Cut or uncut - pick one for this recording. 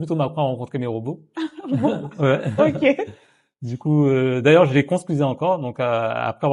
uncut